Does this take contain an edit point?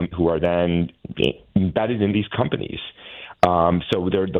no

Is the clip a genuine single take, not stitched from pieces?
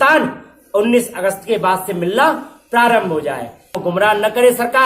no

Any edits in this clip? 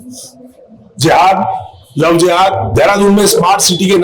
yes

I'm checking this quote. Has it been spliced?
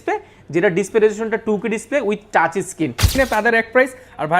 yes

